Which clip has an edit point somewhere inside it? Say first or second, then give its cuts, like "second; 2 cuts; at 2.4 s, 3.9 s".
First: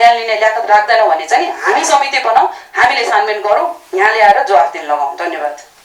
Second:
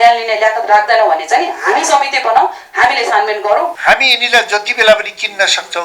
second; 1 cut; at 3.8 s